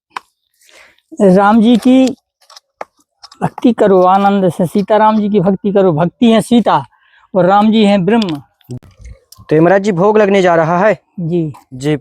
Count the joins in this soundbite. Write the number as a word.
one